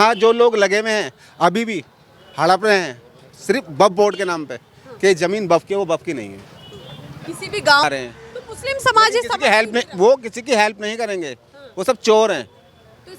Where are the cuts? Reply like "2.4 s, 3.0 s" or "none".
7.8 s